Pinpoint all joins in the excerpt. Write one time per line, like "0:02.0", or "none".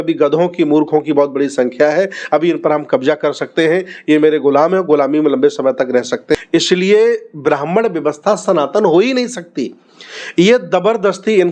0:06.4